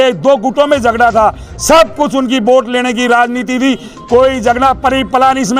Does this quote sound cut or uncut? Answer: uncut